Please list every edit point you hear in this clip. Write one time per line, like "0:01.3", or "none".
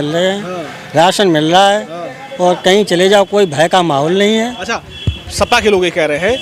none

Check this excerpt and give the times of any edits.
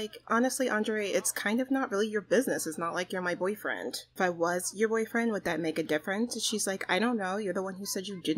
0:04.1

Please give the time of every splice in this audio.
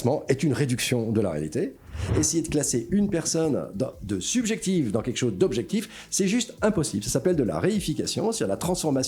0:02.1

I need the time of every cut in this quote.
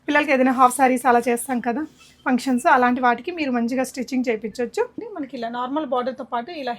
0:05.0

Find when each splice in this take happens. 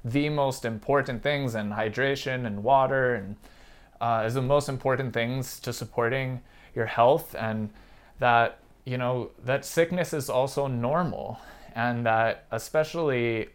none

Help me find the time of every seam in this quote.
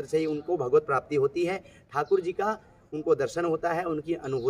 none

